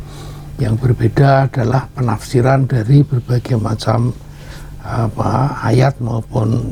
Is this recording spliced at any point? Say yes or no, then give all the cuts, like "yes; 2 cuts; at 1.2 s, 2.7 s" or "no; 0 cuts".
no; 0 cuts